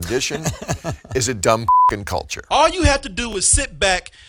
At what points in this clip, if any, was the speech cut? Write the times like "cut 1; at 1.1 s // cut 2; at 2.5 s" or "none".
cut 1; at 2.3 s